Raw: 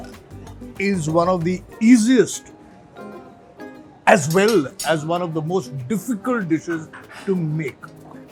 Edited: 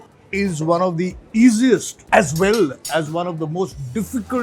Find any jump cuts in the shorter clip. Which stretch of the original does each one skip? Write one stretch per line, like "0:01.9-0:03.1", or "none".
0:02.4-0:03.9